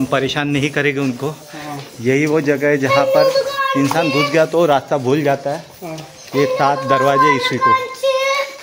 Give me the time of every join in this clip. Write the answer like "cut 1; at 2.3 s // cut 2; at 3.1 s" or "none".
none